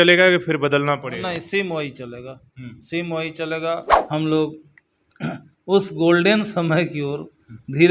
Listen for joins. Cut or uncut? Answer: cut